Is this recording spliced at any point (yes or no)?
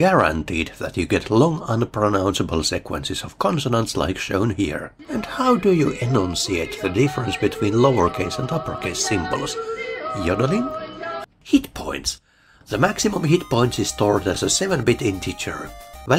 yes